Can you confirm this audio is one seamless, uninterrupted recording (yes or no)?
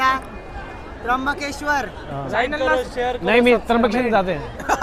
yes